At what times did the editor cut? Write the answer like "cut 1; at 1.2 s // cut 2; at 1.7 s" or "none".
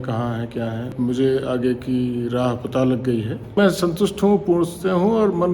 cut 1; at 0.9 s // cut 2; at 3.6 s